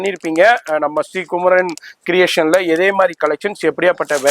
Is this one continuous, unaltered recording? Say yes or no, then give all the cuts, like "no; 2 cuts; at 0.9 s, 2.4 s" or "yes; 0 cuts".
yes; 0 cuts